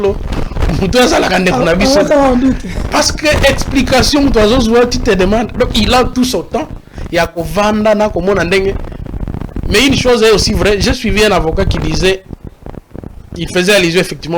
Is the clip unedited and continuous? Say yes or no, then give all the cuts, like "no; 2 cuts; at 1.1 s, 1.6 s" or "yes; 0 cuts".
yes; 0 cuts